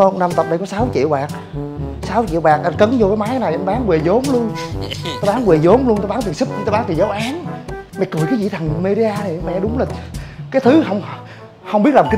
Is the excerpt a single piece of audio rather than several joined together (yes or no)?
yes